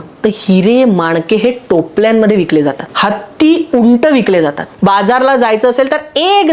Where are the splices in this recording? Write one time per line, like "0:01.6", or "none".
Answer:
0:02.9
0:04.7